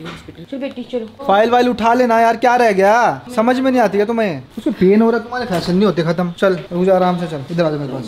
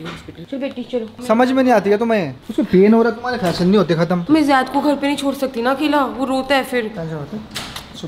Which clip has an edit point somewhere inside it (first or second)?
second